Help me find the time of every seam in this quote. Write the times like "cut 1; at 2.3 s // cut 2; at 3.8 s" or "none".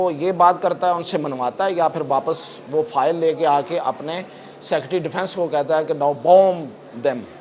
none